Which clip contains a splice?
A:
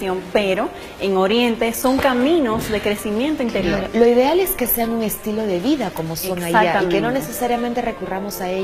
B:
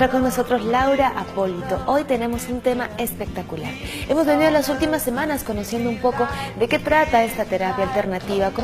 B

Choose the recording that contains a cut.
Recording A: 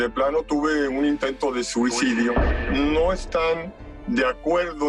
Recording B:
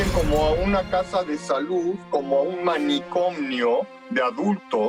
A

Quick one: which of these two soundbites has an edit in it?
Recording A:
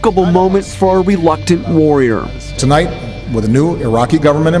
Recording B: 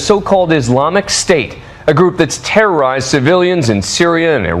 A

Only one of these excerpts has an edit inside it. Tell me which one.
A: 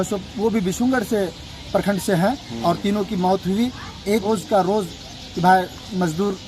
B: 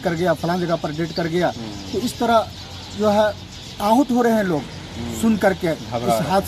A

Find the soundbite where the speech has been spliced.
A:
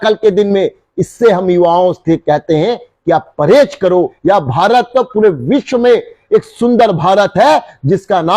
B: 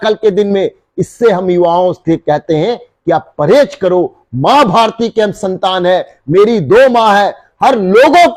A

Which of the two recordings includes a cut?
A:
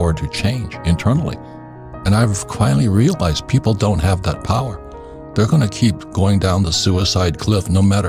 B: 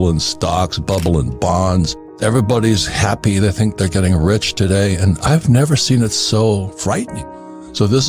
B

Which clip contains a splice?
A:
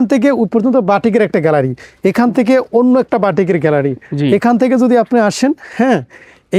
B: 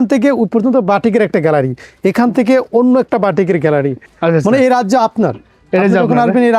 B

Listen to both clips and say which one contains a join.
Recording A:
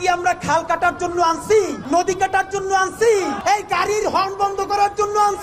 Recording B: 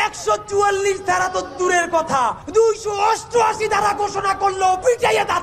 A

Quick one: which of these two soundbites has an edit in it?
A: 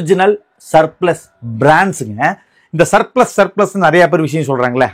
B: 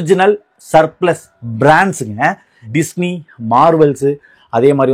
B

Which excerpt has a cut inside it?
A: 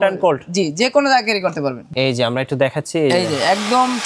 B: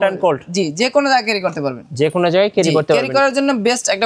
A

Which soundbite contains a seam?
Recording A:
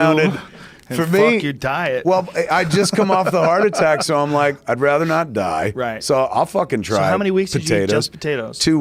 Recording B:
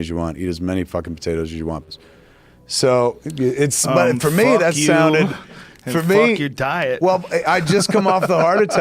B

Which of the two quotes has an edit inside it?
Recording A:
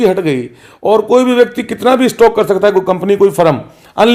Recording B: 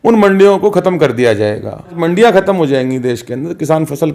B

